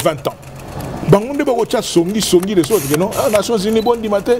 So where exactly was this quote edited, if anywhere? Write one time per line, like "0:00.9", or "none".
0:00.9